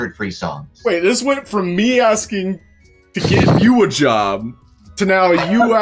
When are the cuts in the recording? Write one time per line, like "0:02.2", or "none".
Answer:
none